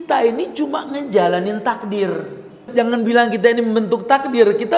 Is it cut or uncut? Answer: cut